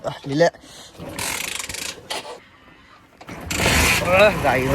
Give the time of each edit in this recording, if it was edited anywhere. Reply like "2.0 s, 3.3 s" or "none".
2.4 s